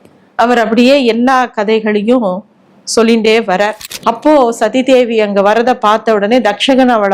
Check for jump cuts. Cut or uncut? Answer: cut